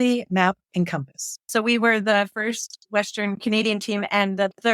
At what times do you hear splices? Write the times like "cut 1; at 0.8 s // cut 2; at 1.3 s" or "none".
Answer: cut 1; at 1.4 s